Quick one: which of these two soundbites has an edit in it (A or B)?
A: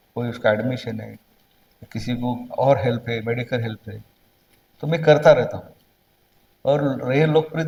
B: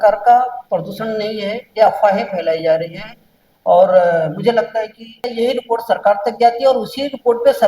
B